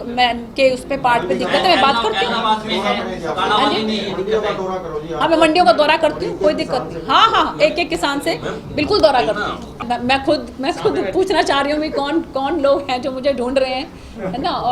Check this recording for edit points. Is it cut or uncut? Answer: cut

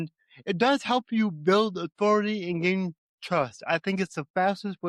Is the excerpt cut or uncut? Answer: uncut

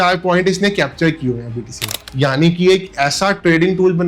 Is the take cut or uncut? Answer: cut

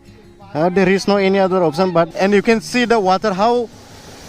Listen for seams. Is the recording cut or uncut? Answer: cut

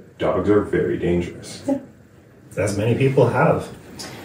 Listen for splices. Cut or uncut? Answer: uncut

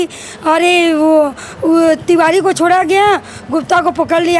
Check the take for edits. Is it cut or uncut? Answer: uncut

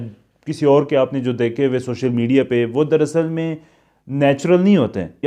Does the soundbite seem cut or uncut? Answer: uncut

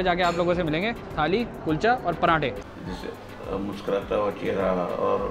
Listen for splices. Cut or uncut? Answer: cut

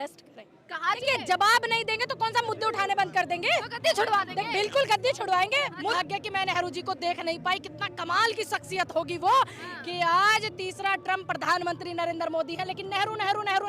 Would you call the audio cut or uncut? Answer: cut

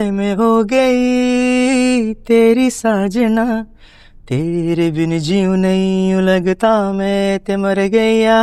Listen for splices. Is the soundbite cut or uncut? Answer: uncut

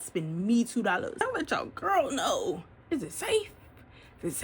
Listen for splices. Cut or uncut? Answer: cut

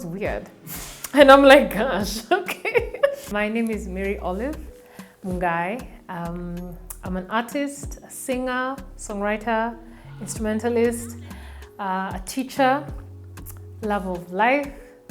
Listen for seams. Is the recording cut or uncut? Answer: cut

